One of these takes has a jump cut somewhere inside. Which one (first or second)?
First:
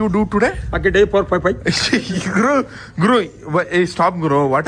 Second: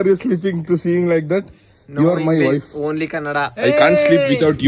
second